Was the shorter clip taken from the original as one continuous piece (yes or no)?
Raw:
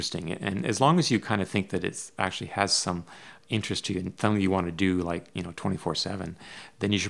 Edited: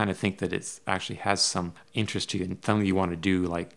no